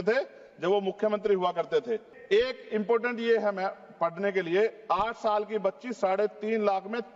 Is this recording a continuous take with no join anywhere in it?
no; 1 cut; at 2.1 s

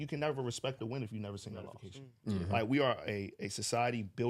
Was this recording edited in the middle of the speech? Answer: yes; 1 cut; at 1.8 s

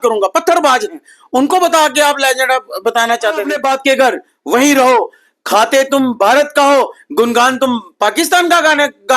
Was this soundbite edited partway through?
yes; 1 cut; at 3.5 s

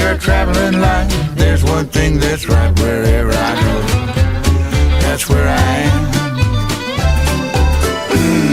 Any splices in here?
no; 0 cuts

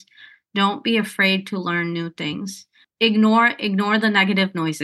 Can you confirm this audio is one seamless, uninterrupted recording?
yes; 0 cuts

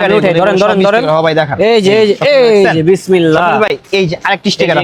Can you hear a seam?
no; 0 cuts

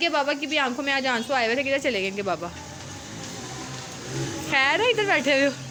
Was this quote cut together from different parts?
no; 0 cuts

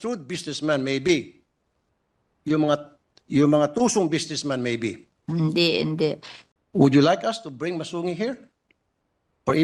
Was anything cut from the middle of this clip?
yes; 1 cut; at 6.3 s

